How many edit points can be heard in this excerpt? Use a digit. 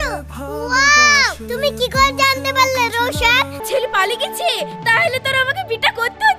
1